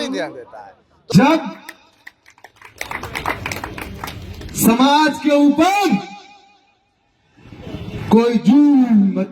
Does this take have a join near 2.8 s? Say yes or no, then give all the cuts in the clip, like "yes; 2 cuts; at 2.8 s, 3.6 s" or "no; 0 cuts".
no; 1 cut; at 1.1 s